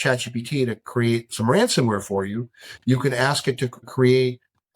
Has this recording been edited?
yes; 1 cut; at 3.9 s

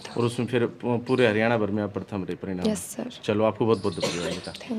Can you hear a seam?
no; 0 cuts

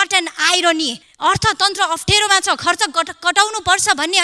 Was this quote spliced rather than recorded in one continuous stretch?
yes; 1 cut; at 1.0 s

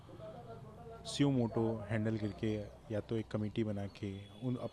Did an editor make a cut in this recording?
no; 0 cuts

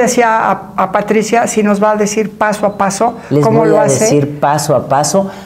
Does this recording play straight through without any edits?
yes; 0 cuts

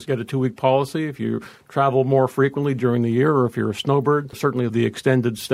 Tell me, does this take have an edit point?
no; 0 cuts

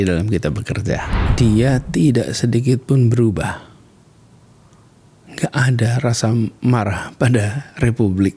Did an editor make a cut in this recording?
yes; 1 cut; at 1.2 s

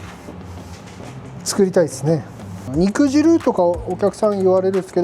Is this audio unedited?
no; 1 cut; at 2.6 s

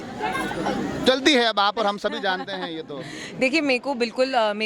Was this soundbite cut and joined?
no; 0 cuts

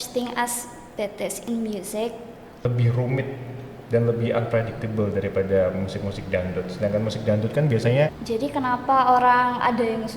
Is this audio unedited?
no; 2 cuts; at 2.6 s, 8.2 s

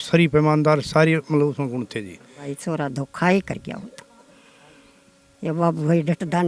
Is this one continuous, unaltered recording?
no; 1 cut; at 2.5 s

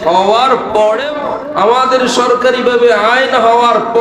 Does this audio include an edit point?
yes; 1 cut; at 1.1 s

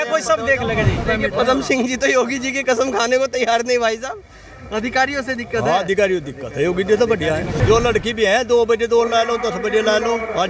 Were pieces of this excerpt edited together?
yes; 2 cuts; at 1.0 s, 7.6 s

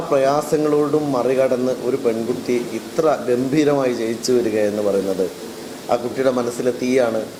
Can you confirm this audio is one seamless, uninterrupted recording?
yes; 0 cuts

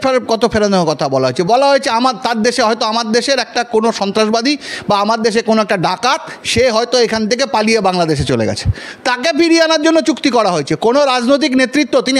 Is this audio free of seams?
yes; 0 cuts

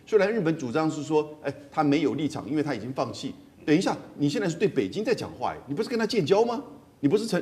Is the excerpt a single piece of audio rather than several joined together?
yes; 0 cuts

